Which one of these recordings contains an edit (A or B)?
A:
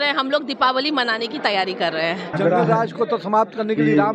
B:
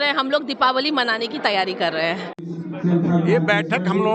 A